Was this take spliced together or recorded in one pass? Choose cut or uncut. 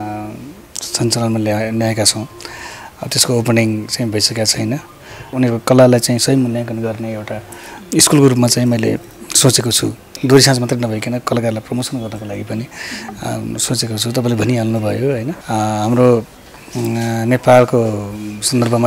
cut